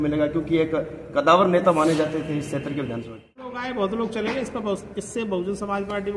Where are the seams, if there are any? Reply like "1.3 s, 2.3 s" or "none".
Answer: 3.6 s

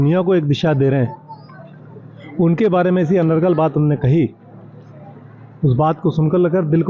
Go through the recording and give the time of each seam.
none

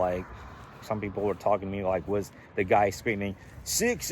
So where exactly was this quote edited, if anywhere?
none

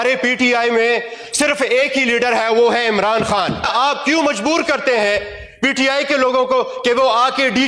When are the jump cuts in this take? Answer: 3.7 s

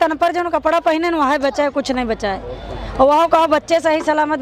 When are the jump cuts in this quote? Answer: none

